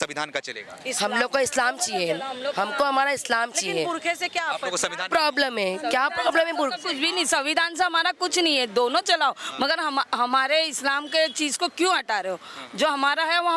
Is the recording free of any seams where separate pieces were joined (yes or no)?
yes